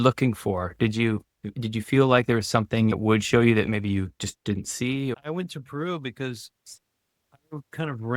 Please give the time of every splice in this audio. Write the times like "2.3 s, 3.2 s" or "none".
2.9 s, 5.1 s